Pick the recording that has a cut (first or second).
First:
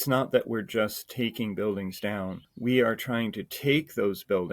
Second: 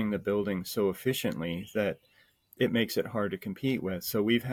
first